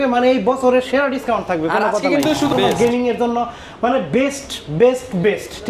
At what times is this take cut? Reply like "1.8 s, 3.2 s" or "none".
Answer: 2.5 s